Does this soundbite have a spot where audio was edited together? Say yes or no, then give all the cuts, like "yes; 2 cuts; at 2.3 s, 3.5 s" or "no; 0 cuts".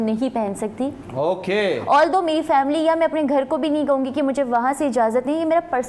no; 0 cuts